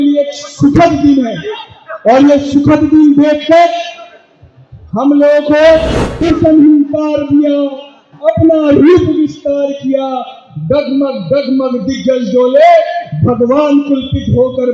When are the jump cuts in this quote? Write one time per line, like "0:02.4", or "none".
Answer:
0:06.2